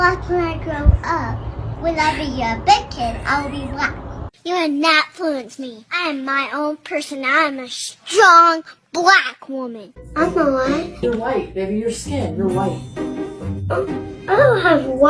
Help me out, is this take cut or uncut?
uncut